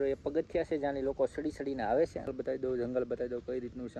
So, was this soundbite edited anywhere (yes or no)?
yes